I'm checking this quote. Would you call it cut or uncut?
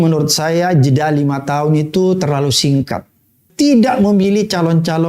cut